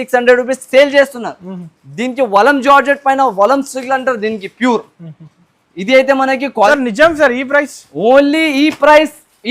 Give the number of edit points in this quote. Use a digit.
1